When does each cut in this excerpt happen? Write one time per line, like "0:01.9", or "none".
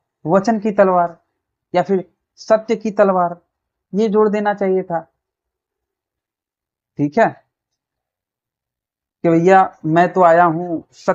none